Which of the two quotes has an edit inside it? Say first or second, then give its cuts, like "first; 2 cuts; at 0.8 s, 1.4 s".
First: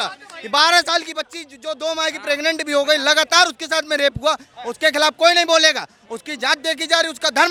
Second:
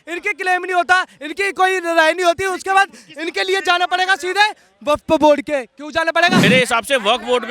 second; 1 cut; at 6.4 s